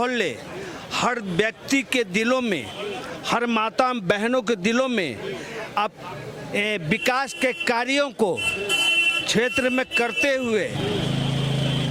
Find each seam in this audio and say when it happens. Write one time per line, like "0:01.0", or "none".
none